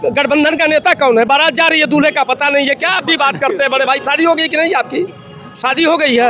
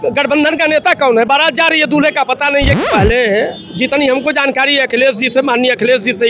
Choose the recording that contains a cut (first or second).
second